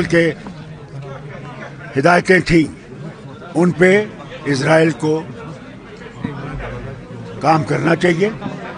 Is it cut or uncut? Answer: uncut